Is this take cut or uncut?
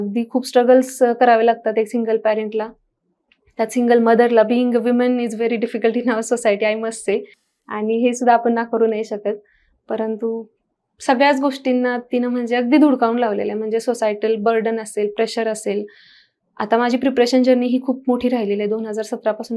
uncut